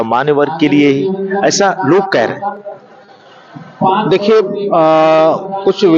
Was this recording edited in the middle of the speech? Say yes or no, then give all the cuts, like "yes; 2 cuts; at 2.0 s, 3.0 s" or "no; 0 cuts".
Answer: no; 0 cuts